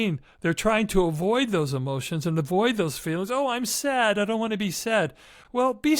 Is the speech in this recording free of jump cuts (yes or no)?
yes